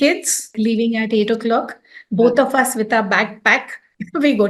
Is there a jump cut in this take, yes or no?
no